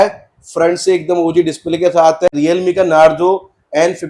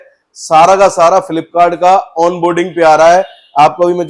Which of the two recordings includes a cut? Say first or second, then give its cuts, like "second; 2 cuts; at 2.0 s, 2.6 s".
first; 1 cut; at 2.3 s